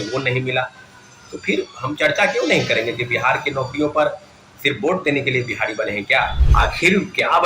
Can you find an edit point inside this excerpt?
yes; 1 cut; at 6.4 s

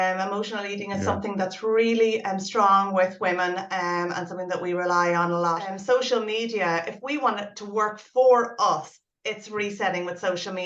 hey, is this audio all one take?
no; 1 cut; at 5.7 s

